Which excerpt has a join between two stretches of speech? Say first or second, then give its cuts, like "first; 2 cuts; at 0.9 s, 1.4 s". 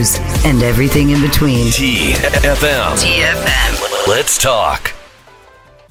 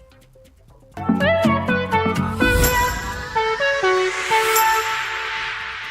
second; 1 cut; at 0.9 s